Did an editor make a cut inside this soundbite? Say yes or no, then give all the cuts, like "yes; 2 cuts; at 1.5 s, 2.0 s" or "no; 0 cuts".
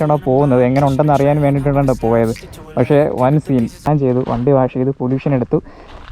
yes; 1 cut; at 3.9 s